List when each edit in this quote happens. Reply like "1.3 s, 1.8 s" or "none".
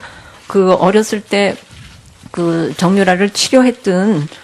none